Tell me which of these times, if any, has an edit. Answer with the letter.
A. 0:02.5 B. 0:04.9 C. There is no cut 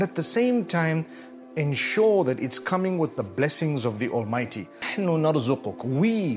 B